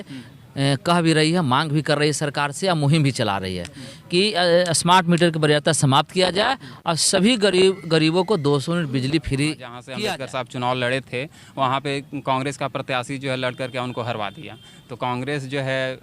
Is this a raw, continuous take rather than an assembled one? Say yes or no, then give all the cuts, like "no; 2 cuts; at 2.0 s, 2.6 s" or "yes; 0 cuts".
no; 1 cut; at 9.8 s